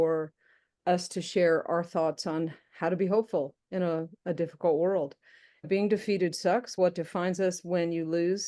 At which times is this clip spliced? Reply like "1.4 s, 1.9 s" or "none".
5.7 s, 6.7 s